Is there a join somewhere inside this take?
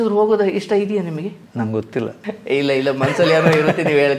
yes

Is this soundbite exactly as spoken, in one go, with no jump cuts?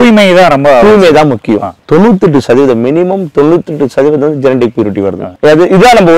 yes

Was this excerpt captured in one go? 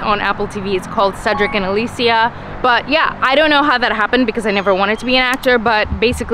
yes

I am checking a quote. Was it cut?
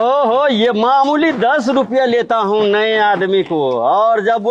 no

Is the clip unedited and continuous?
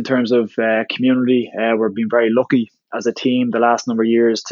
yes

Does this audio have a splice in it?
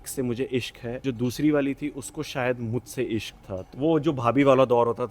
yes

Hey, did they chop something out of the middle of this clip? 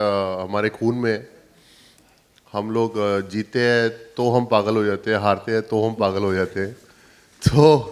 no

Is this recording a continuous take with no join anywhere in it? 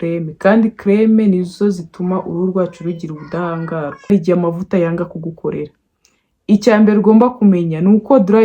no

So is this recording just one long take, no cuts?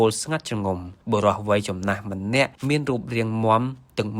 no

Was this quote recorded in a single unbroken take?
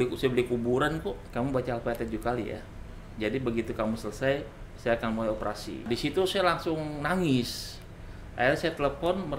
no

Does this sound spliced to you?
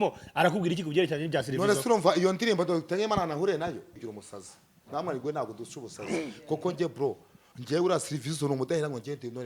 yes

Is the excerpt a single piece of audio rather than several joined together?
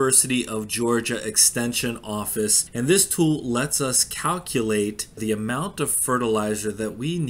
no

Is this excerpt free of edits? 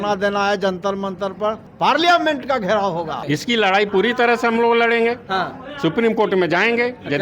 no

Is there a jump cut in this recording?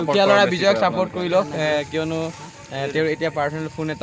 no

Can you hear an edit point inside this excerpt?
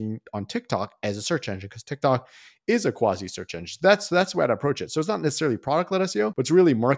no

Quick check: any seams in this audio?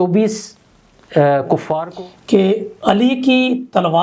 yes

